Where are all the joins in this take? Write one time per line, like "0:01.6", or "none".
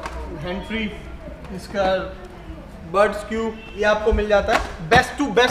0:03.7